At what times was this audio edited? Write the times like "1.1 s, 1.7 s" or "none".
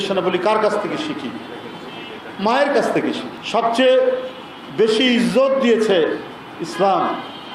none